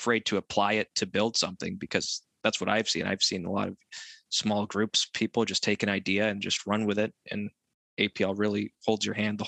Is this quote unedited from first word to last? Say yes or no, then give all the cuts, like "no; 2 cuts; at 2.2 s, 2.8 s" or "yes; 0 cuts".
yes; 0 cuts